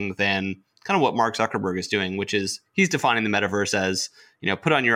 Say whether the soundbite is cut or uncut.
uncut